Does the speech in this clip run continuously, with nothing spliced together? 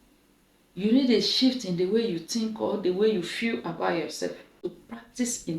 no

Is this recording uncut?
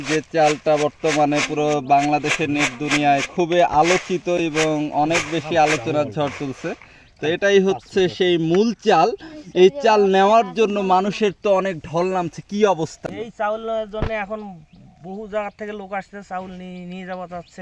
yes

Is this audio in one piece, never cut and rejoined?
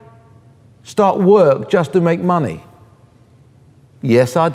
yes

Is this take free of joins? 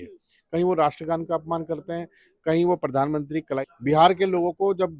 no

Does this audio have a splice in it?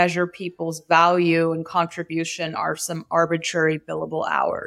no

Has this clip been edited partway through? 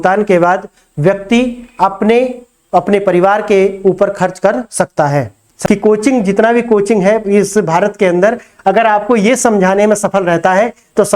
yes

